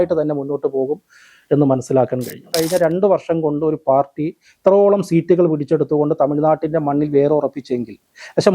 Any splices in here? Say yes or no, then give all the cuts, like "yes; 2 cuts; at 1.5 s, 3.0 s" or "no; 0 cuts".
yes; 1 cut; at 2.4 s